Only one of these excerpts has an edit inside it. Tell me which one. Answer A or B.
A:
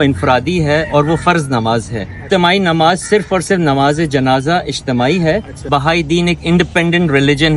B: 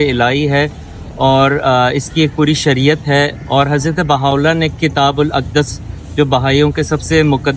A